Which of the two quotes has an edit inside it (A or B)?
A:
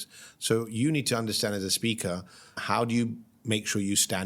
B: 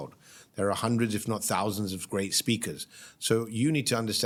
A